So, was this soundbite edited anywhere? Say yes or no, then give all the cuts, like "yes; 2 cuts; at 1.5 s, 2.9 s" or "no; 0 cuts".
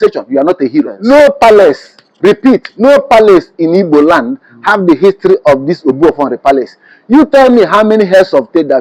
yes; 1 cut; at 0.9 s